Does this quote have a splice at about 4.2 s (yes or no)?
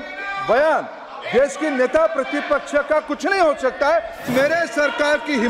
yes